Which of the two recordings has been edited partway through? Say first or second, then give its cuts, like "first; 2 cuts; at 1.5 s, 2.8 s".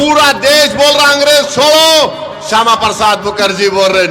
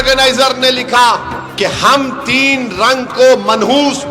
second; 1 cut; at 1.4 s